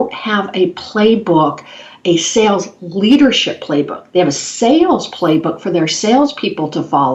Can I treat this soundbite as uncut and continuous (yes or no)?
yes